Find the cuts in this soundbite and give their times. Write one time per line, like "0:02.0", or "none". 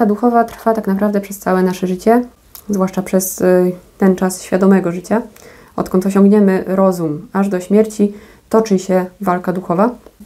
none